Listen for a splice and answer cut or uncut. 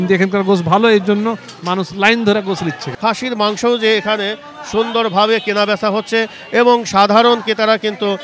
cut